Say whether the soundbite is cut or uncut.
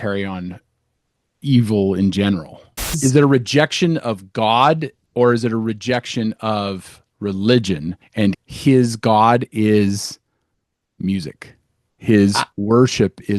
cut